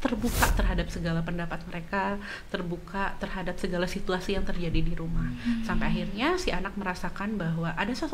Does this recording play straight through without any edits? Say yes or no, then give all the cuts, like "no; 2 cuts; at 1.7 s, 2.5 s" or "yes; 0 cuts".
yes; 0 cuts